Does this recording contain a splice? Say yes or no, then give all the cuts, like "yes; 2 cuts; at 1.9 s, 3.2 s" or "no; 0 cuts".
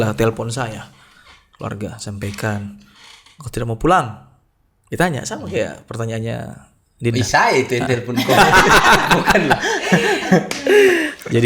no; 0 cuts